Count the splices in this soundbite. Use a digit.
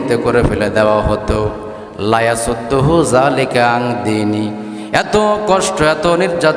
0